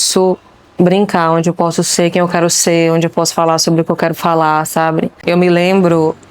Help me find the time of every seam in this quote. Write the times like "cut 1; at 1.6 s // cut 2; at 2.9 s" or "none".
cut 1; at 5.1 s